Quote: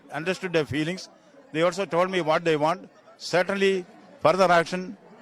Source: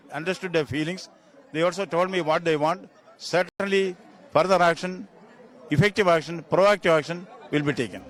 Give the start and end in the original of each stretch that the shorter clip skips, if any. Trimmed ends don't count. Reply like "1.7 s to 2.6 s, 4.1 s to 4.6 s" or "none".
3.5 s to 3.6 s